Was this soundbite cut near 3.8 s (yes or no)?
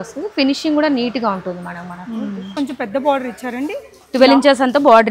no